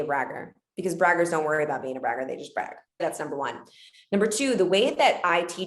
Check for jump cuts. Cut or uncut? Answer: cut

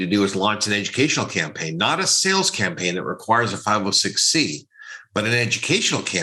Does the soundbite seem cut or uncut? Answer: uncut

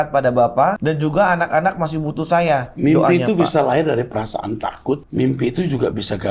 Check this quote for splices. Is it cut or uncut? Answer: cut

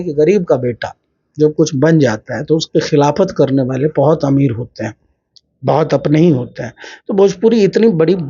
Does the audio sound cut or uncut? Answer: uncut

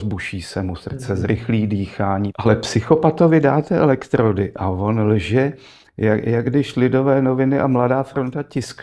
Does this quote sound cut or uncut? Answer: cut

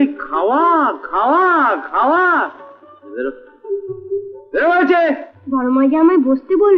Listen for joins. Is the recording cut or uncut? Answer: uncut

